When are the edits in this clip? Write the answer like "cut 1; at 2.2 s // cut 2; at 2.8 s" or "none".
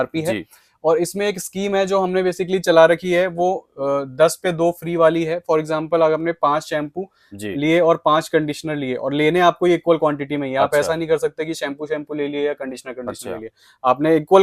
none